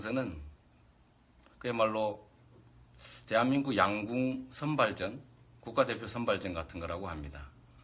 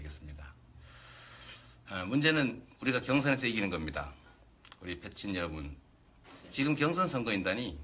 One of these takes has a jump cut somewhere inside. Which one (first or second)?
first